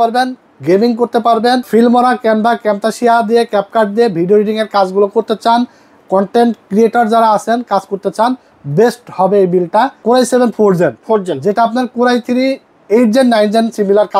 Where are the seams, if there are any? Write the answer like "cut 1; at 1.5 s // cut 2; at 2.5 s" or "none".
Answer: cut 1; at 1.7 s // cut 2; at 10.0 s